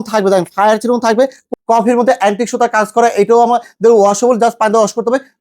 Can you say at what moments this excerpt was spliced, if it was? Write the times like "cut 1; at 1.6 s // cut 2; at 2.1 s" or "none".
cut 1; at 1.4 s